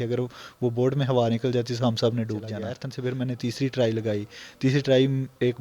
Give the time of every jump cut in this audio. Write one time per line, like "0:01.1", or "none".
0:02.8